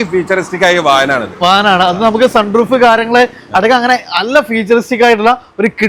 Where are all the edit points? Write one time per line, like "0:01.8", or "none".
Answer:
none

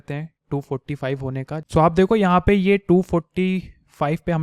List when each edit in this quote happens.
0:01.7

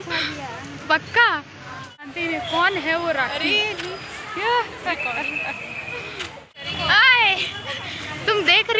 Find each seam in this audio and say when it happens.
0:02.0
0:06.6

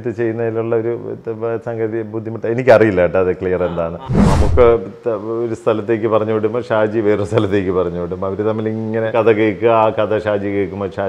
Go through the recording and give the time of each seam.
0:04.1
0:09.1

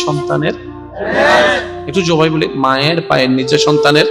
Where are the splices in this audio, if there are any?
none

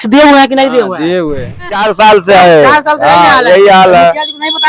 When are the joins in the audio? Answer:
0:01.8

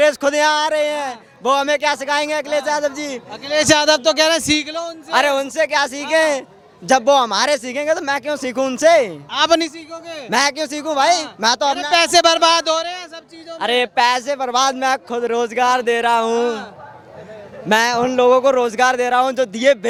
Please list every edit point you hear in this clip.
none

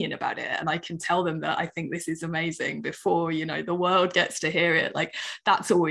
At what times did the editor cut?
none

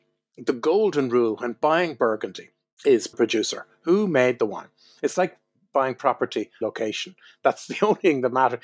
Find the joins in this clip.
none

